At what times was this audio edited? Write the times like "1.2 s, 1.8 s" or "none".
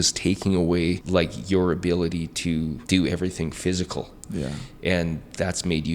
1.0 s, 2.8 s